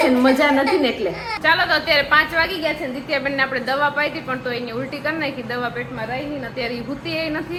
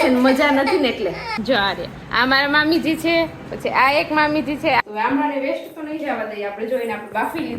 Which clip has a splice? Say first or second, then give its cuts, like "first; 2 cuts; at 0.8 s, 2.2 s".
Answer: second; 2 cuts; at 1.3 s, 4.8 s